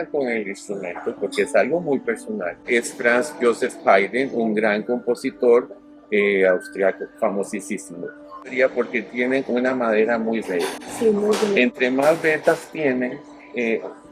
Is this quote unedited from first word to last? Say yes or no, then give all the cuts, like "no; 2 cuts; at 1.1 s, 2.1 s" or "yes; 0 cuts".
no; 2 cuts; at 2.7 s, 8.5 s